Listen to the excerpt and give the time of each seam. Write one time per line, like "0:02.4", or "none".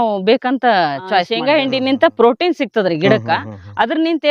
0:01.3